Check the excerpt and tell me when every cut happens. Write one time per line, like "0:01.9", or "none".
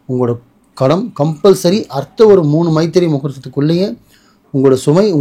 none